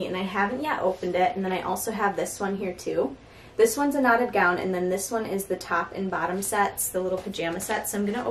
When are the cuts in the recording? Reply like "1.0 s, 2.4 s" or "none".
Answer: none